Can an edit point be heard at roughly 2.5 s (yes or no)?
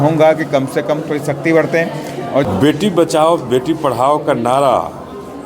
yes